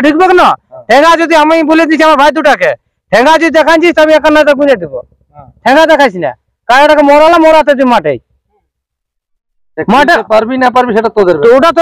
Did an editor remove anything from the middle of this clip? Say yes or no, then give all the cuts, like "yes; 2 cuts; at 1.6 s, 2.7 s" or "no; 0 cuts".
no; 0 cuts